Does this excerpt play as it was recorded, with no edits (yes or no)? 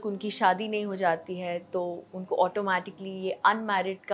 yes